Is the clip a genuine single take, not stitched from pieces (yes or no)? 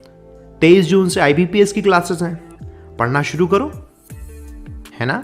no